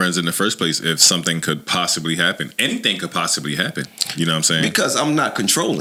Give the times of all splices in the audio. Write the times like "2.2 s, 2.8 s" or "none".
none